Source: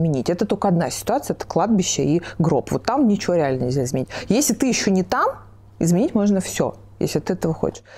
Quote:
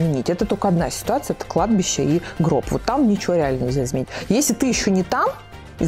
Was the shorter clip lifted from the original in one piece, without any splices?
yes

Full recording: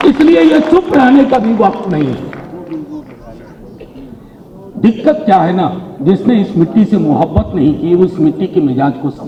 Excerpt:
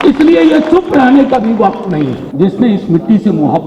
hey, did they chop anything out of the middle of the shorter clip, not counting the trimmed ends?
yes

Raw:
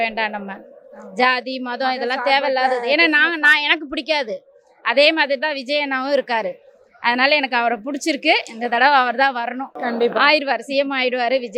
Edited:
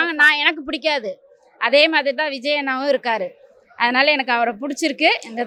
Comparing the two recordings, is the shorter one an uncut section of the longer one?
yes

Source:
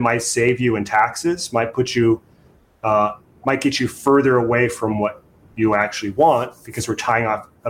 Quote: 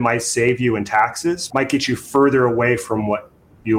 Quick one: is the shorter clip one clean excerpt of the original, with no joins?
no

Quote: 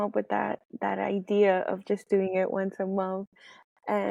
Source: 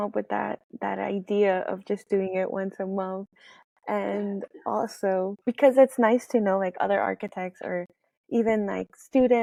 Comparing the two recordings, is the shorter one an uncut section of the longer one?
yes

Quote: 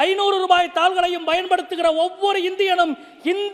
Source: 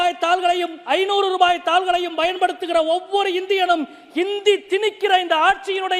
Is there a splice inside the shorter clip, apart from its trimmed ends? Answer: no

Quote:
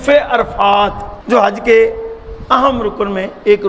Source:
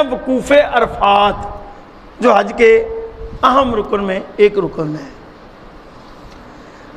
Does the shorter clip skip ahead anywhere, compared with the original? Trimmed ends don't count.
yes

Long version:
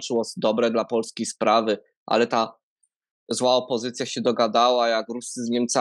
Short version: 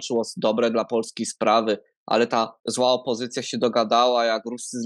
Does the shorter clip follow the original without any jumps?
no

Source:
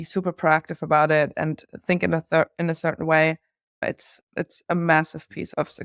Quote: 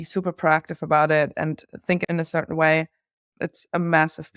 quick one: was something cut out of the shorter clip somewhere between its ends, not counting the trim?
yes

